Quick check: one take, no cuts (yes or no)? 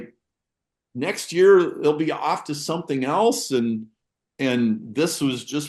yes